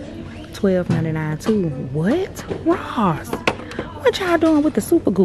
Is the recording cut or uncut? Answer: uncut